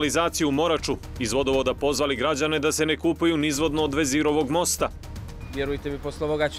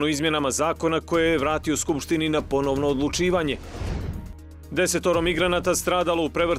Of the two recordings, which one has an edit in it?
first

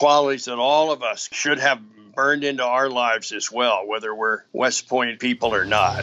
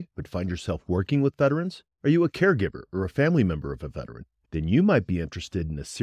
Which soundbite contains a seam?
first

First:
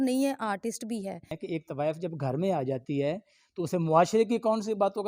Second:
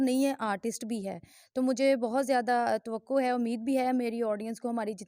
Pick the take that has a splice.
first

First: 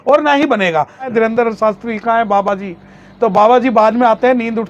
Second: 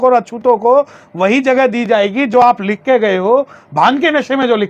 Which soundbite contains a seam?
first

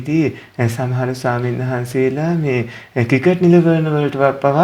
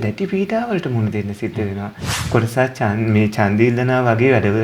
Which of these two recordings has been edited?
second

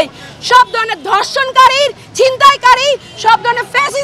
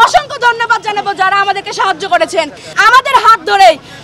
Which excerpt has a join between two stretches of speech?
second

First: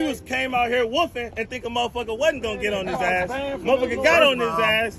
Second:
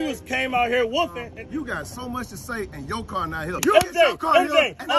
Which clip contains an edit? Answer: second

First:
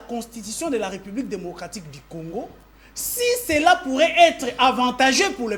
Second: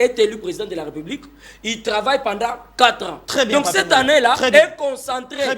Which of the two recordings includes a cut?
second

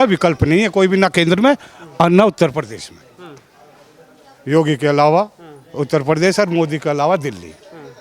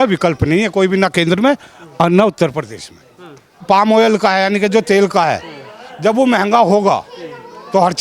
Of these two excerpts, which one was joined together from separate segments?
second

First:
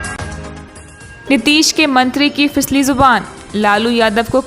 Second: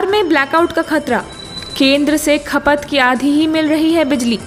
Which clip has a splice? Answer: first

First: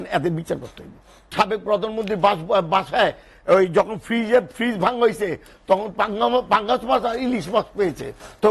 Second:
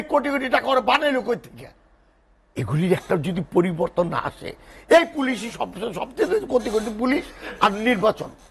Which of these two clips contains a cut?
first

